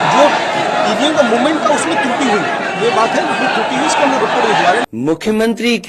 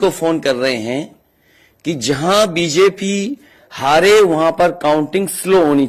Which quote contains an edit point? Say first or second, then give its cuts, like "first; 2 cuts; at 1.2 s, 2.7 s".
first; 1 cut; at 4.9 s